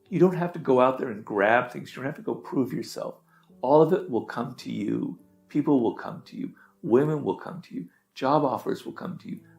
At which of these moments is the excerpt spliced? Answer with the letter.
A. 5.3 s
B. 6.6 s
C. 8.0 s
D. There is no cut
D